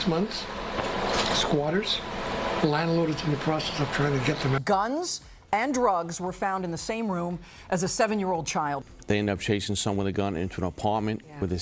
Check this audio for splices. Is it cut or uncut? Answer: cut